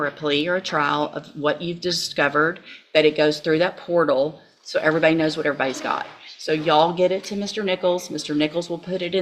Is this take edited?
no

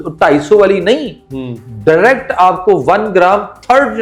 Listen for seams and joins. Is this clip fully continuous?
yes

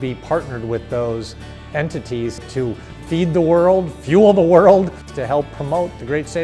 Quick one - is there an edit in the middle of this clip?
yes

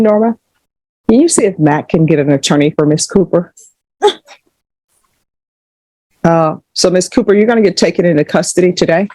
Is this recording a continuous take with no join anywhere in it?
yes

